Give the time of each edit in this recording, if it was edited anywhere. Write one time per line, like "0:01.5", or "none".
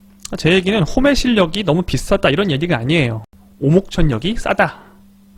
none